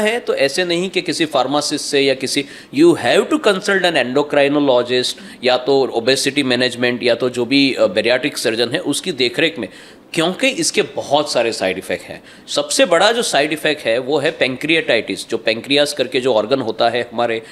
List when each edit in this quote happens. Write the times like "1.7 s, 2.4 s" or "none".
none

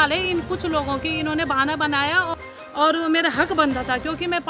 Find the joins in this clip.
2.3 s

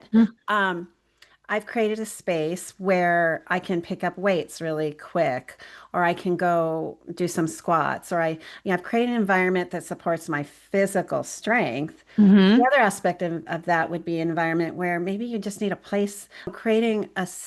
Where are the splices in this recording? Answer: 16.5 s

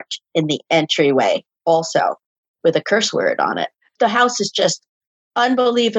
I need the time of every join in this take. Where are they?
3.8 s

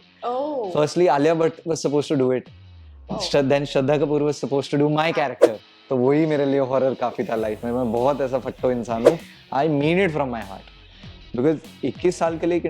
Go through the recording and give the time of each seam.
5.7 s, 9.3 s

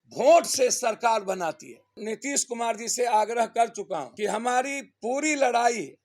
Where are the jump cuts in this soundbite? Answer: 2.0 s

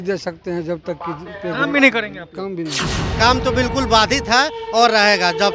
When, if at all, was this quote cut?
3.1 s

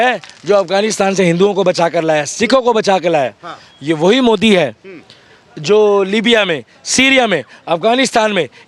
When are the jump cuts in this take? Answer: none

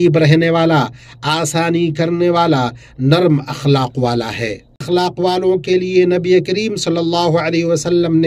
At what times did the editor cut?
4.8 s

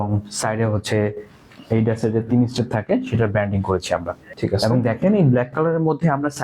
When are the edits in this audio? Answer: 4.2 s

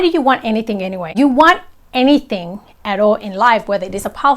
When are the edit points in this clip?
1.1 s

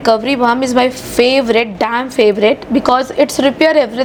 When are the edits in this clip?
none

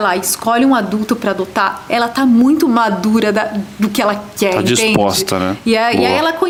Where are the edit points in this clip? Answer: none

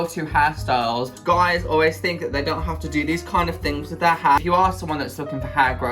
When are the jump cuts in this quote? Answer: 1.1 s, 4.4 s

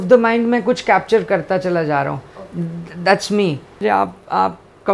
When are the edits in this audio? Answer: 3.8 s

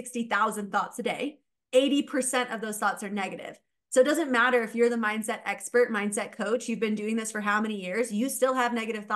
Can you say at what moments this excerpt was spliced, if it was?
none

